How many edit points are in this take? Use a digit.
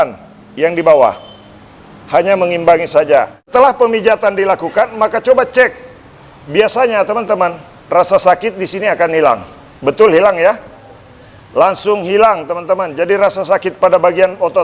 1